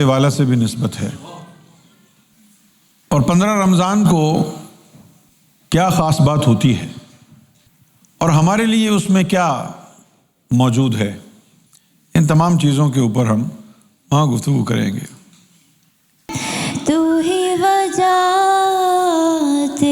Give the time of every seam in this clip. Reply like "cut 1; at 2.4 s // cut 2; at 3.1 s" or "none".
cut 1; at 16.3 s